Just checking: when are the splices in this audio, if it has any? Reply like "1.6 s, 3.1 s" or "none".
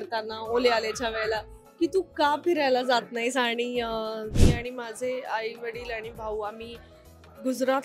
4.3 s